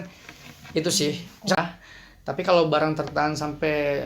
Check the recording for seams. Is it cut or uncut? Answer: cut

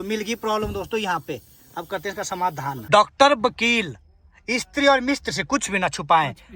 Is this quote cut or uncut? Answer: cut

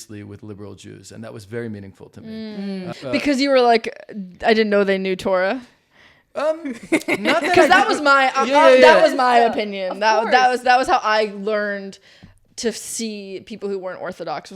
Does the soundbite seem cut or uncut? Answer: cut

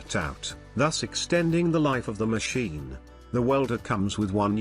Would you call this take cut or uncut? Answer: cut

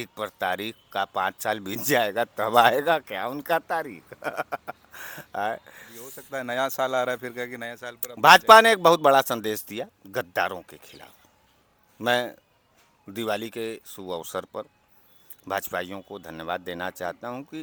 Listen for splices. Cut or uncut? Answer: uncut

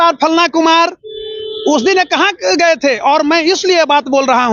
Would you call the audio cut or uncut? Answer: uncut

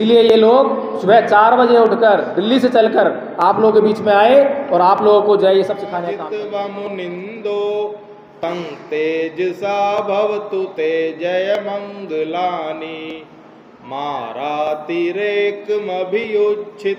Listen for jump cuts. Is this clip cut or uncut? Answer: cut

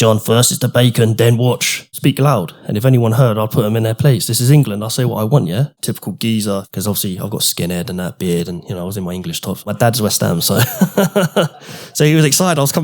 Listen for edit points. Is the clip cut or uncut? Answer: cut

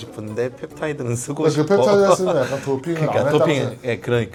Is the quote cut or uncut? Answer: uncut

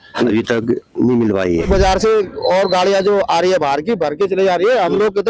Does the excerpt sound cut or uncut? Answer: cut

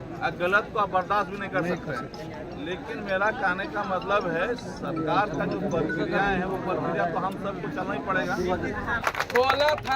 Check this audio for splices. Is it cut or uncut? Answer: cut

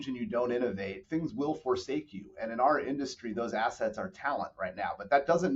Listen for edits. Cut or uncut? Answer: cut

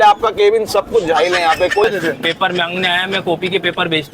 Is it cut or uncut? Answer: cut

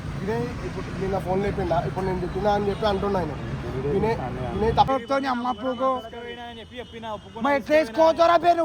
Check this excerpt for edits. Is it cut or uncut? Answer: cut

